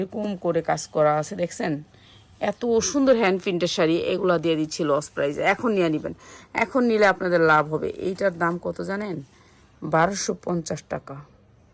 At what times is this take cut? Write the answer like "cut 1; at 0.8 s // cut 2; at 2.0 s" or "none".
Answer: none